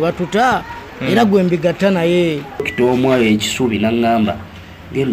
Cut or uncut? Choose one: cut